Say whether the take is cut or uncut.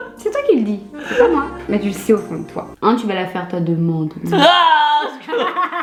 uncut